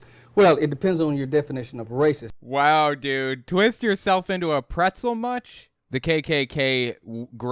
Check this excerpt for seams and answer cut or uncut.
cut